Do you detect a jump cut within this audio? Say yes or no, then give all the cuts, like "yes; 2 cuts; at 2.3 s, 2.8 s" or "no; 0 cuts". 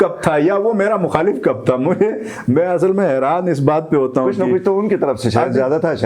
no; 0 cuts